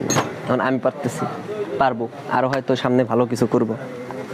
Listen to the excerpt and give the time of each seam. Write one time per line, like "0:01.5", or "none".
none

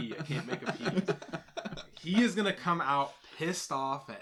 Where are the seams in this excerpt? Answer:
none

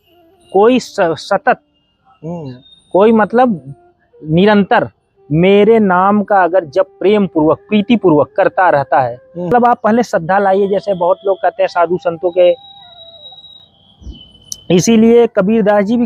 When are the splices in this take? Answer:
0:09.5

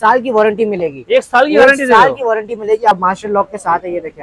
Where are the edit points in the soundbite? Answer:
0:02.9

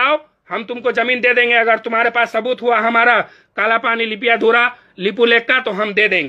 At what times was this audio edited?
none

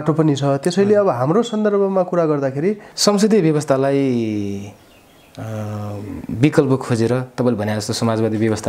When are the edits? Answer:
0:02.9

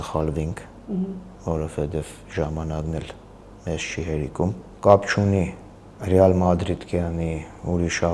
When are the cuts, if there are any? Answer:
0:04.6

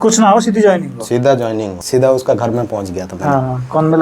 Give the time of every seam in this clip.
0:01.8

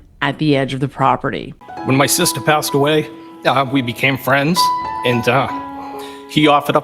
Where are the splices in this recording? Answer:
0:01.5

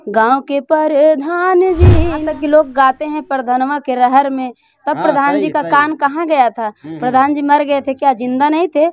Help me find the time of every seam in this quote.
0:02.2

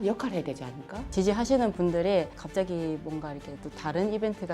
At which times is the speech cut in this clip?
0:01.0
0:02.4

